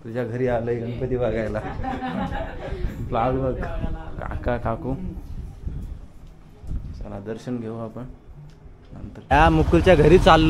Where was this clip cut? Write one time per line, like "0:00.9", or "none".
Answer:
0:09.2